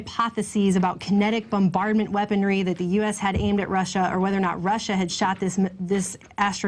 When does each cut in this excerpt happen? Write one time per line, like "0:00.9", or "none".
0:03.0